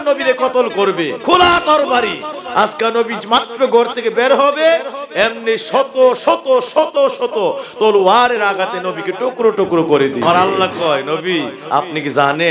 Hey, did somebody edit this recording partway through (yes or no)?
yes